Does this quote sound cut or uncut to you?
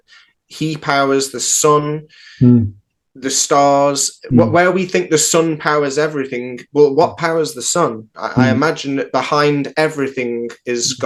uncut